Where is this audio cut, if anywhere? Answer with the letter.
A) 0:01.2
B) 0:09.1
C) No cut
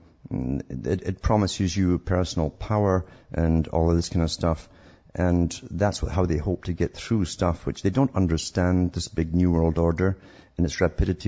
C